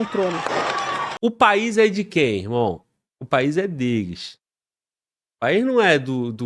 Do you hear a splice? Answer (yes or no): yes